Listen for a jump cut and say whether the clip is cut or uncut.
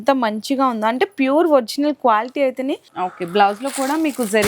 cut